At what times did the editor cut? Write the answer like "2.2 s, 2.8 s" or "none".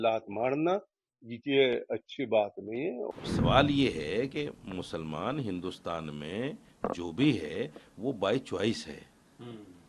3.1 s